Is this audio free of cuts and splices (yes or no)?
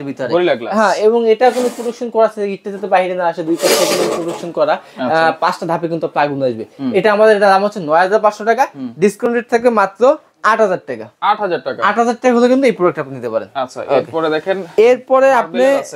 yes